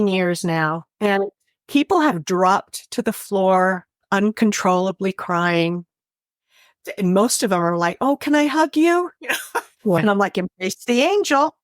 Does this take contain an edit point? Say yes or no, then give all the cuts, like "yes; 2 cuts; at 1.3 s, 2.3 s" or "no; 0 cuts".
yes; 1 cut; at 10.0 s